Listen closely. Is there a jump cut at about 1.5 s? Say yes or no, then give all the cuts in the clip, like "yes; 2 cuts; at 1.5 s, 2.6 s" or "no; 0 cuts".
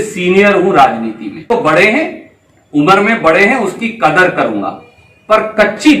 yes; 1 cut; at 1.5 s